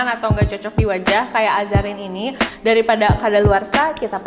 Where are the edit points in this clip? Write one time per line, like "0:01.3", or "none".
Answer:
0:02.5